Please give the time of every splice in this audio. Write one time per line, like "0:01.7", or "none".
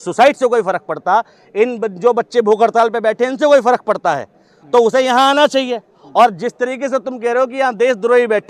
none

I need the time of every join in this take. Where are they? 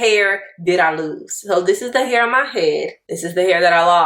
0:03.0

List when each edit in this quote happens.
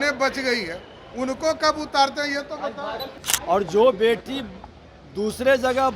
0:03.2

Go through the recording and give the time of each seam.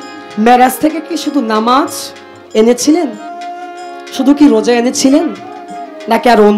none

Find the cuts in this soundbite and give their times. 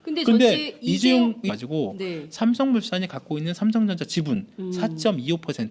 none

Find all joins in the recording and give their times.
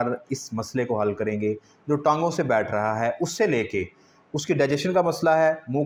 none

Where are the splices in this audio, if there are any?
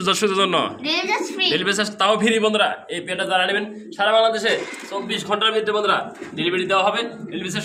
none

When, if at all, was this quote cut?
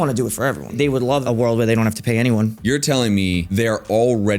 0:01.1
0:02.6
0:03.5

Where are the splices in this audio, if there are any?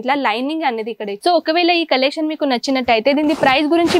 0:01.1

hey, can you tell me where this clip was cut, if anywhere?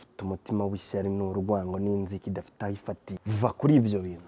0:03.1

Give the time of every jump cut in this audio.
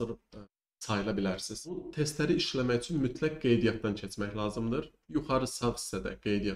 0:01.9

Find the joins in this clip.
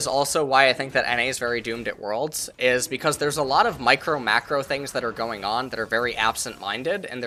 none

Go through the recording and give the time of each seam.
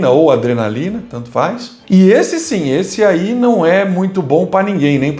none

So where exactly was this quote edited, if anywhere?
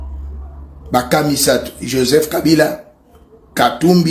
none

